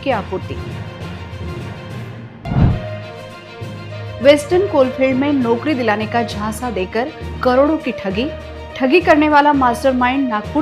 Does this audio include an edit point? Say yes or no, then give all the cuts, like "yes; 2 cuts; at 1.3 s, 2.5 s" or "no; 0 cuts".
no; 0 cuts